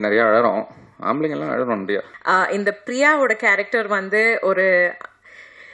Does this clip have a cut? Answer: yes; 1 cut; at 2.1 s

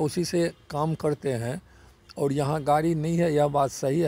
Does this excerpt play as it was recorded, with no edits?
yes; 0 cuts

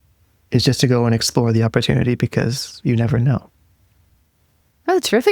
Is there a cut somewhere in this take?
no; 0 cuts

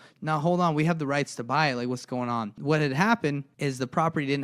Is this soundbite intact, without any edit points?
no; 2 cuts; at 2.5 s, 3.5 s

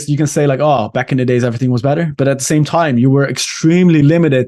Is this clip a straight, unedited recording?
yes; 0 cuts

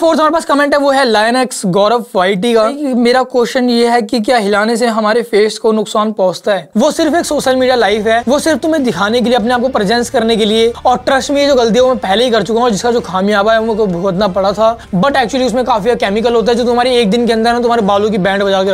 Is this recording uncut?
no; 5 cuts; at 2.8 s, 6.7 s, 8.2 s, 10.8 s, 14.8 s

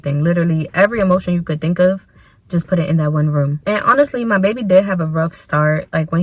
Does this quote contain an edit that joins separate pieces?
no; 0 cuts

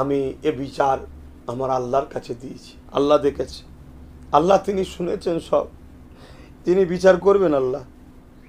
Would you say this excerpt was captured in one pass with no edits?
yes; 0 cuts

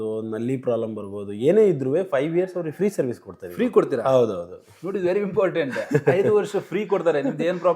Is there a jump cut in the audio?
no; 0 cuts

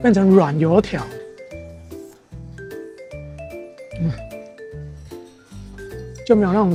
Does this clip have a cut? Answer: no; 0 cuts

